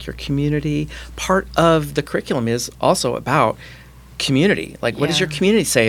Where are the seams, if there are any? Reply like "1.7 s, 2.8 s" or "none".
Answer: none